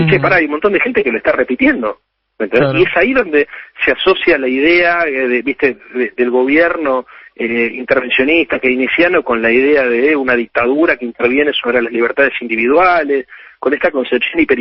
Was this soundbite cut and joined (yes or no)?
no